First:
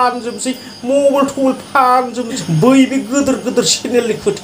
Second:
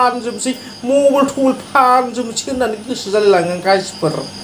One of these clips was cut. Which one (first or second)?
first